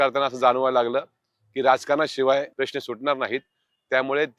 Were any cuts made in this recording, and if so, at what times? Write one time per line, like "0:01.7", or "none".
0:02.5

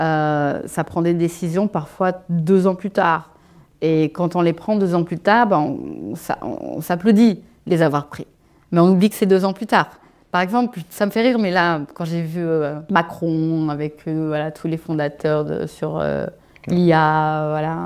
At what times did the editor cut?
0:12.8

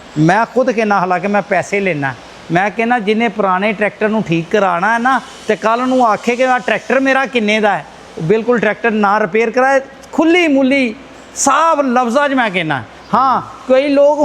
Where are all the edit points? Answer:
none

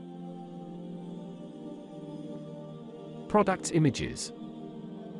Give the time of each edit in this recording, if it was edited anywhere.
0:03.3
0:04.1

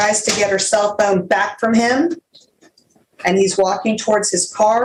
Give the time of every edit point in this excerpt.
none

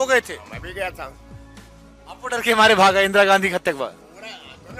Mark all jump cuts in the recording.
none

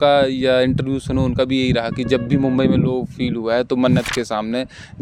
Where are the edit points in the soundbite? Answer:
none

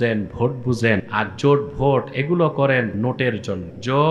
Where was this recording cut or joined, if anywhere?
0:01.1
0:03.2

